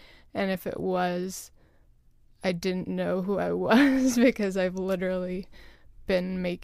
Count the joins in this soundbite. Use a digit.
0